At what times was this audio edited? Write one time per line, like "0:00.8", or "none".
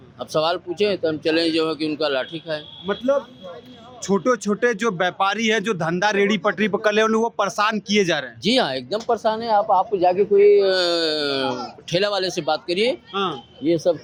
none